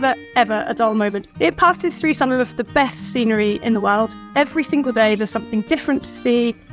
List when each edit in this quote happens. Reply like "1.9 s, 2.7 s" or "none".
1.2 s, 4.2 s